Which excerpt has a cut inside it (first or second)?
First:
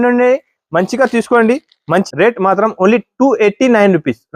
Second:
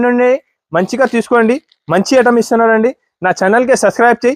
first